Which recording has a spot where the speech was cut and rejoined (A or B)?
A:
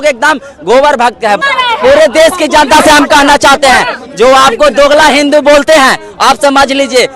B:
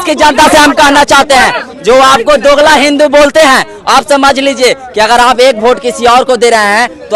A